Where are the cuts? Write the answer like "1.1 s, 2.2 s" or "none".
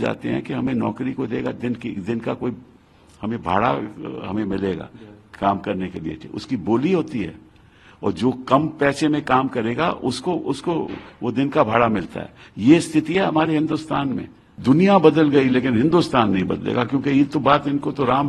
14.5 s